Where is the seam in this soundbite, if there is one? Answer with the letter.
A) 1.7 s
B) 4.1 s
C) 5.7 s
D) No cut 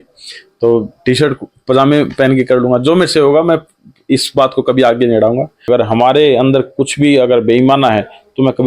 C